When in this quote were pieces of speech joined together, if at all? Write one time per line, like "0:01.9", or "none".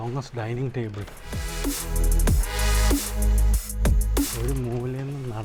none